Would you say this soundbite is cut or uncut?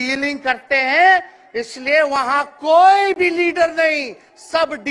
uncut